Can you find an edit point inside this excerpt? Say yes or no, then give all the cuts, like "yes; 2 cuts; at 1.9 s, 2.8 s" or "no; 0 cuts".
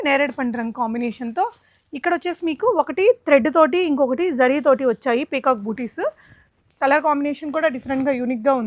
no; 0 cuts